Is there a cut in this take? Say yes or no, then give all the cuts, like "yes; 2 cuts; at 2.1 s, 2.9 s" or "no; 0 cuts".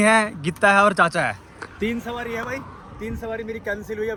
no; 0 cuts